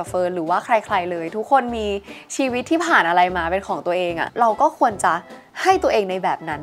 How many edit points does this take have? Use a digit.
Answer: 1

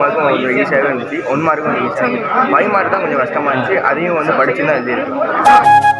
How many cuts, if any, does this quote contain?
0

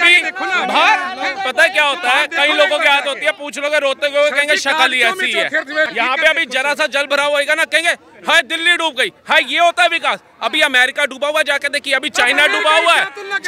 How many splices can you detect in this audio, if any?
1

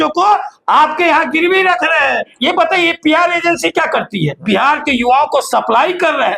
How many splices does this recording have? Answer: 2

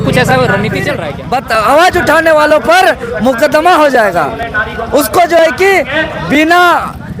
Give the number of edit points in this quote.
1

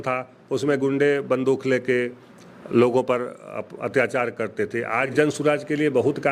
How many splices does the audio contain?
1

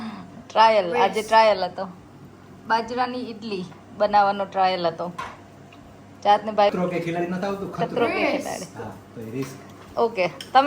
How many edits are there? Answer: 1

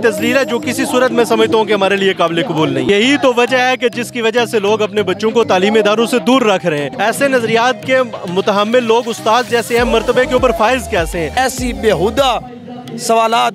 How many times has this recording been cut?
3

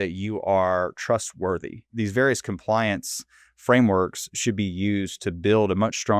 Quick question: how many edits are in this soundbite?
1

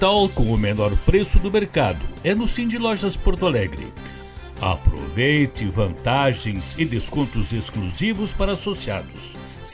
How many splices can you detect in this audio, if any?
0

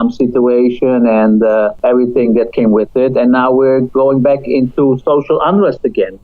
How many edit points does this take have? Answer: 1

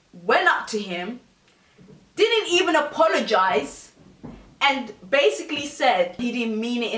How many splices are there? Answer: 0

